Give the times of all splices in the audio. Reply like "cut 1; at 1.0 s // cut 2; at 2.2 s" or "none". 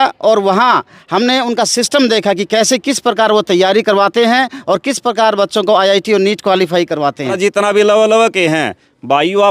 cut 1; at 7.3 s

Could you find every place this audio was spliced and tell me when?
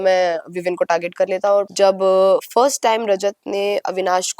cut 1; at 1.7 s

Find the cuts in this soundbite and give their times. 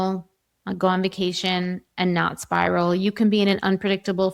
none

